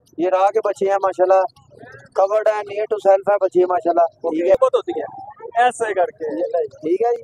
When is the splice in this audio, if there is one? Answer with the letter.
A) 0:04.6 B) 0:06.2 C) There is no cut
A